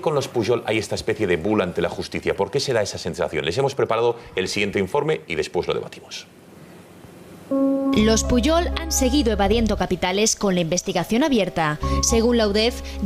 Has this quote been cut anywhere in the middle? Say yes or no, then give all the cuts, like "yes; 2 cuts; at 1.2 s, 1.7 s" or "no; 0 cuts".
yes; 1 cut; at 8.3 s